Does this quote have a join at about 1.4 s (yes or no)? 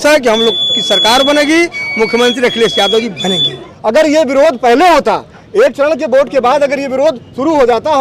no